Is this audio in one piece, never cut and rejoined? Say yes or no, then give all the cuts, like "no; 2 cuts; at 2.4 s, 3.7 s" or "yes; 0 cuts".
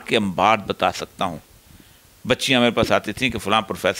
yes; 0 cuts